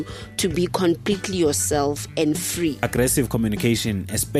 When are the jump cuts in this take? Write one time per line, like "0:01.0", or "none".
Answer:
0:02.8